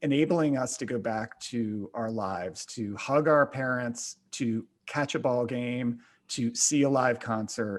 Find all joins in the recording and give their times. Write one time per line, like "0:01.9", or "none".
none

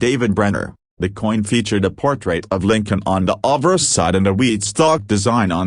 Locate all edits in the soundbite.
0:02.4
0:03.2

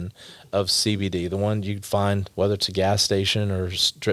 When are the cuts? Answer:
0:02.3

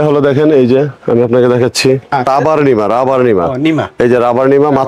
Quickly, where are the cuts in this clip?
0:02.3

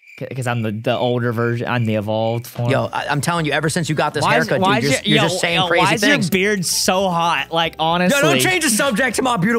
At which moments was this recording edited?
none

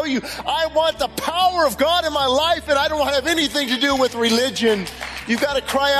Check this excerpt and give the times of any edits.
none

